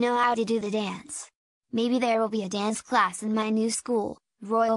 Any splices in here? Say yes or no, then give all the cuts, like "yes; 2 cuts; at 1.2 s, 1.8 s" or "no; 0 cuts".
yes; 1 cut; at 1.8 s